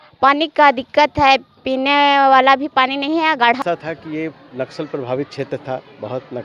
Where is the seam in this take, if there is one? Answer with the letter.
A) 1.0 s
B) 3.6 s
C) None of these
B